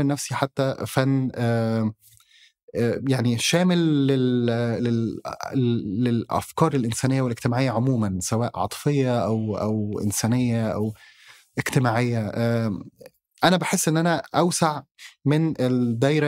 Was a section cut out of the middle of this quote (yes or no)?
no